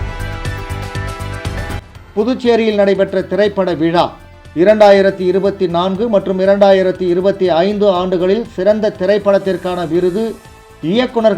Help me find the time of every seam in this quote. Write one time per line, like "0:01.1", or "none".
0:02.0